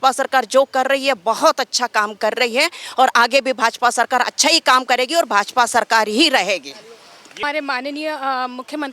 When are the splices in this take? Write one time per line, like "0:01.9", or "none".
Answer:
0:07.4